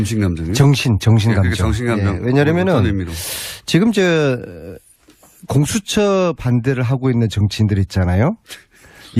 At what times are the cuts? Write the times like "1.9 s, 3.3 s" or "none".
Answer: 1.8 s